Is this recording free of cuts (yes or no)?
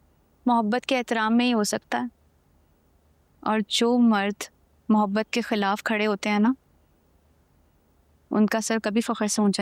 yes